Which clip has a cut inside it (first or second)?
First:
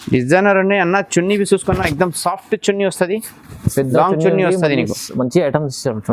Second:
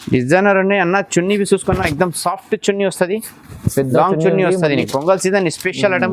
second